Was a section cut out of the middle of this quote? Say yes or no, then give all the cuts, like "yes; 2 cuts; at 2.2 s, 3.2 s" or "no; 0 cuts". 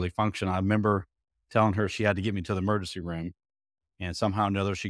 no; 0 cuts